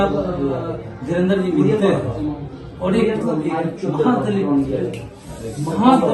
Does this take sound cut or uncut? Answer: cut